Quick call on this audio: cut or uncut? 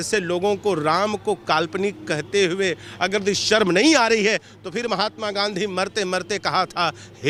uncut